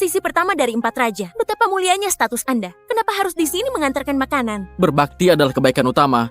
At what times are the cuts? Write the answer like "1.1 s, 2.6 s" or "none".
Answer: 4.7 s

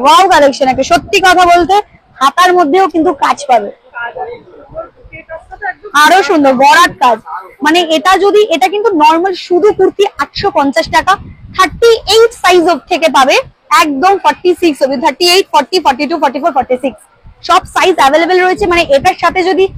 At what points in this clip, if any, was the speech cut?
none

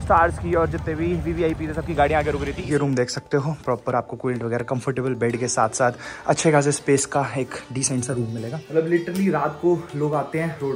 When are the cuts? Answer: 2.6 s, 8.6 s

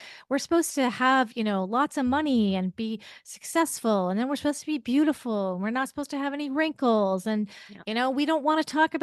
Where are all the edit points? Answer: none

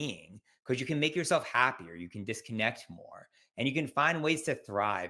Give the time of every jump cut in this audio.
none

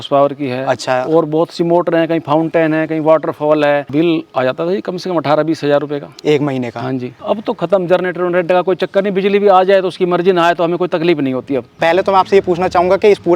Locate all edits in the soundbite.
3.9 s, 7.2 s, 11.7 s

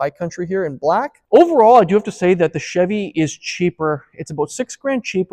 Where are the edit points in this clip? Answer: 1.2 s

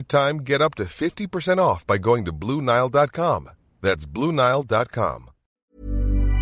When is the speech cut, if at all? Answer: 5.5 s

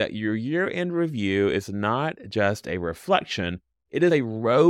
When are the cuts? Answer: none

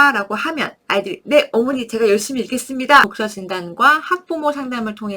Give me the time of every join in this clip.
3.1 s

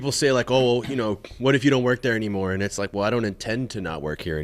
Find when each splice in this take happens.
none

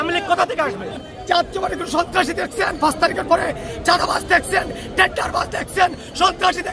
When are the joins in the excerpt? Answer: 1.0 s

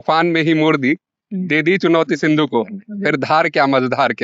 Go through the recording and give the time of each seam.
none

